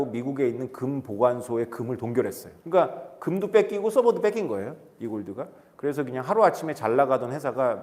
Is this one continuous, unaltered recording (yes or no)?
no